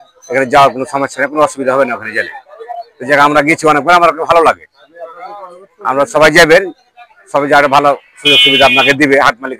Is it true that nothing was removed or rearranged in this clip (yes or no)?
yes